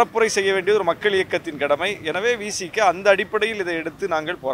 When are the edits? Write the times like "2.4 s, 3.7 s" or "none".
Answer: none

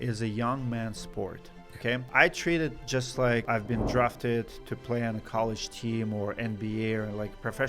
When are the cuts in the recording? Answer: 2.1 s, 3.5 s

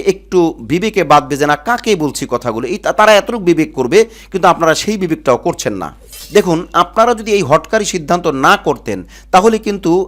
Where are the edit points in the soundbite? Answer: 6.2 s

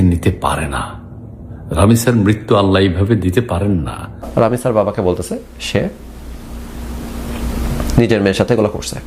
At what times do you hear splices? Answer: 4.3 s

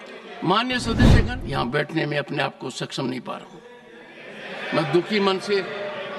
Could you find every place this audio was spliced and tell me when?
1.2 s

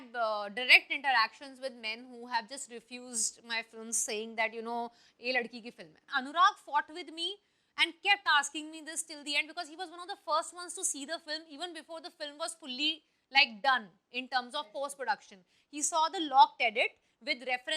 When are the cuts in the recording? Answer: 6.0 s

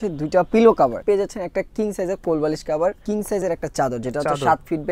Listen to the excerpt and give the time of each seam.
1.0 s, 3.0 s

